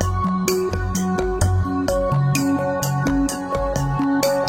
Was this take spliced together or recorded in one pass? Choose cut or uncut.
uncut